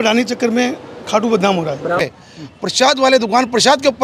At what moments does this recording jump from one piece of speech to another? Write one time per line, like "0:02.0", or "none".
0:02.0